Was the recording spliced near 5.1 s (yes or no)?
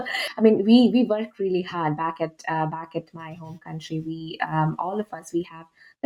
no